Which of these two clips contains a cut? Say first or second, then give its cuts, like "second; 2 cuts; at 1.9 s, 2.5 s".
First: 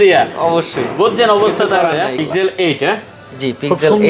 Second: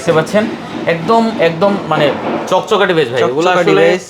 first; 1 cut; at 2.2 s